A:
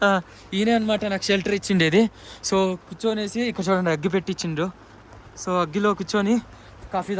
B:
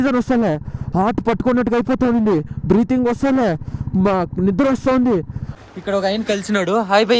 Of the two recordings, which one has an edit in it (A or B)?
B